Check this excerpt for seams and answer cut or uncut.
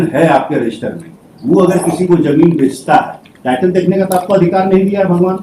uncut